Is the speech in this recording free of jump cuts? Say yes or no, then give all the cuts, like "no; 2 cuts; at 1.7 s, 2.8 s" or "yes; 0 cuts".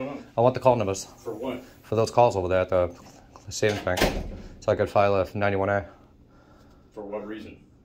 yes; 0 cuts